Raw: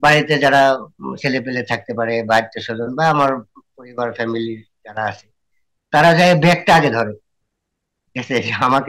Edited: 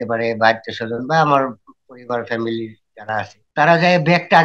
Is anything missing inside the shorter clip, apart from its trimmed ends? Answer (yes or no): yes